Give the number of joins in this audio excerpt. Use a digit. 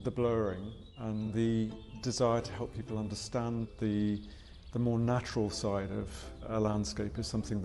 2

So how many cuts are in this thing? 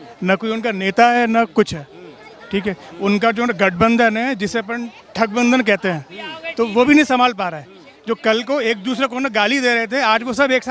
0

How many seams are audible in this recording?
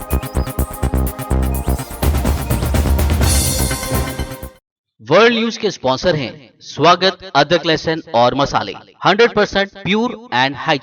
1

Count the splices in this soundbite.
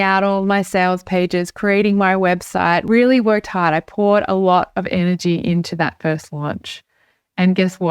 1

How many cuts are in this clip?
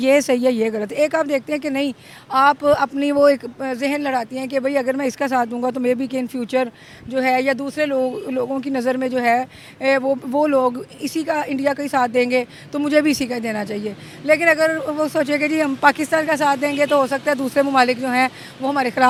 0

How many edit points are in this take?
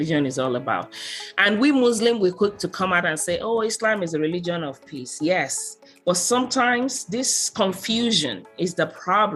0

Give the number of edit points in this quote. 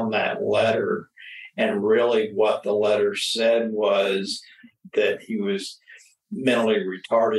1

